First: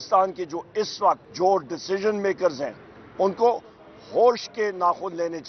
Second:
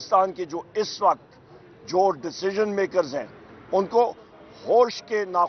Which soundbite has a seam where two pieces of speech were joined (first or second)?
first